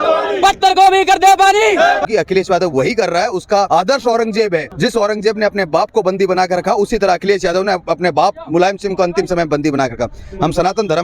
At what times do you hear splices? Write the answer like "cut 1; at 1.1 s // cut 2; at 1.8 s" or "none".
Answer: cut 1; at 2.0 s // cut 2; at 3.7 s // cut 3; at 4.7 s